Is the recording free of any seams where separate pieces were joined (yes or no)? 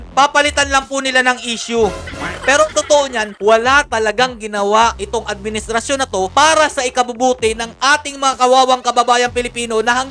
yes